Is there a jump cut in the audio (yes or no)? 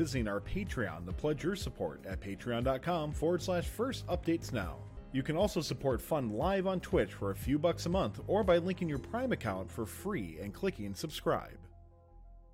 yes